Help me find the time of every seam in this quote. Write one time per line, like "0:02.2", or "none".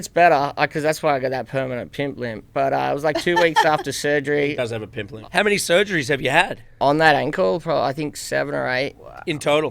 0:05.2